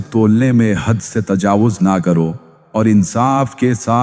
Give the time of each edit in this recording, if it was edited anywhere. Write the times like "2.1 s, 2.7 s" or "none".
2.5 s